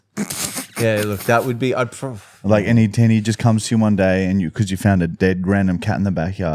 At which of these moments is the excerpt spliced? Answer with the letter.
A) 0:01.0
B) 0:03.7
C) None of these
C